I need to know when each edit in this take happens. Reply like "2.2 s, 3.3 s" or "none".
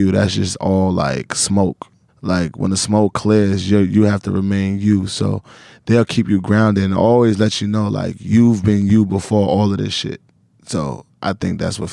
2.0 s, 10.3 s